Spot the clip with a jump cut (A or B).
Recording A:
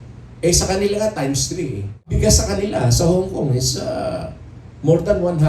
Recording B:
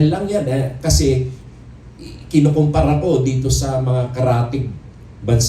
A